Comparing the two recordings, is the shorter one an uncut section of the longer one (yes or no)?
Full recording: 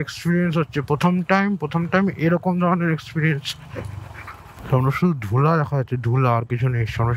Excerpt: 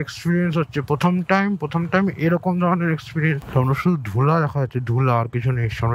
no